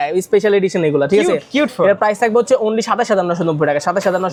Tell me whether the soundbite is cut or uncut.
uncut